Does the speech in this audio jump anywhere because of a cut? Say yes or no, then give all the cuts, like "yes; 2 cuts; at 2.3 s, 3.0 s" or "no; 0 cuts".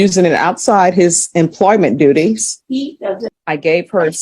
yes; 1 cut; at 3.0 s